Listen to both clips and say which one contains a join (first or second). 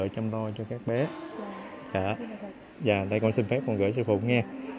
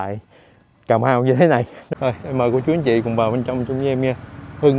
second